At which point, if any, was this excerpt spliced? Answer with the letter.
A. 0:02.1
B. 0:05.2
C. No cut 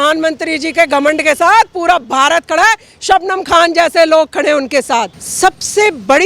B